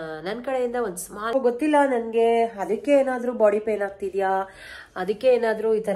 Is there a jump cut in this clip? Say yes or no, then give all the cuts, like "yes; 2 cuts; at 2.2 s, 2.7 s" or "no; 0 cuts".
yes; 1 cut; at 1.3 s